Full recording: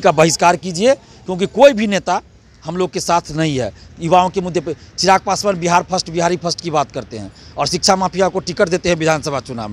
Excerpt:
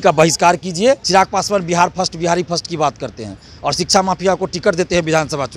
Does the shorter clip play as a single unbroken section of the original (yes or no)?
no